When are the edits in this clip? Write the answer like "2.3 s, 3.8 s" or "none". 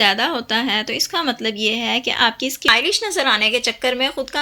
2.7 s